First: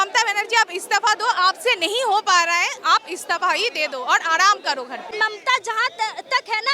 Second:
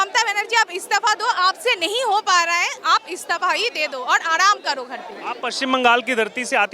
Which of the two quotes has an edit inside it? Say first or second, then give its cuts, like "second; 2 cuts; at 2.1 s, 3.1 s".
first; 1 cut; at 5.1 s